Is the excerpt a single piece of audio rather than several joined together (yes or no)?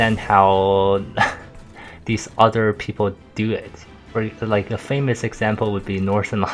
yes